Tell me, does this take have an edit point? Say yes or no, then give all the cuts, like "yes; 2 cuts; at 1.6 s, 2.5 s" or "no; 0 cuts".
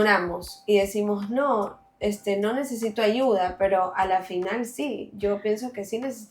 no; 0 cuts